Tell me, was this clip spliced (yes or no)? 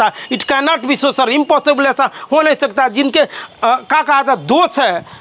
no